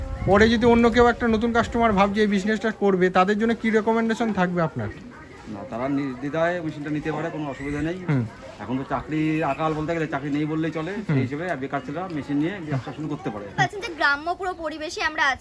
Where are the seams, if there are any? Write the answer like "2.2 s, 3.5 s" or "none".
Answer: 13.5 s